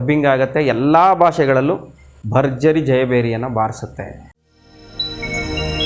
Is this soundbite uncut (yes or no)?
yes